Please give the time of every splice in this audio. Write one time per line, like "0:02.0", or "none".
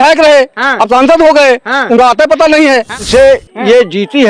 0:03.1